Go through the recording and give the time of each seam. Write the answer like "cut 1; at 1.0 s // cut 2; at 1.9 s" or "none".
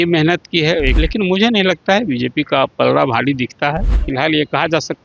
cut 1; at 1.0 s // cut 2; at 4.0 s